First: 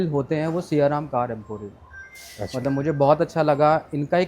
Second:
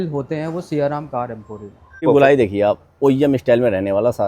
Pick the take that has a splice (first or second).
second